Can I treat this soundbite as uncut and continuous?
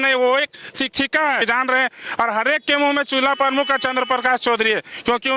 no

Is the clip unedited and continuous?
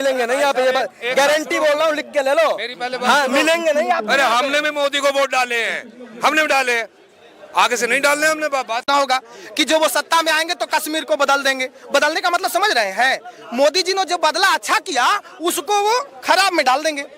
no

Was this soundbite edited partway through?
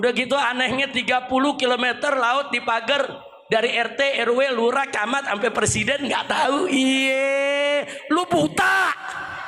no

